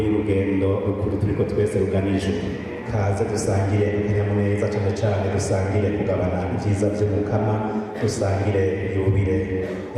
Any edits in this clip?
yes; 1 cut; at 2.7 s

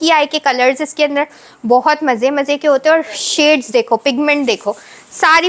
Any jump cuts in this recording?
no; 0 cuts

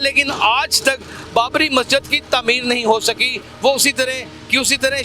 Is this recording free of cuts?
yes; 0 cuts

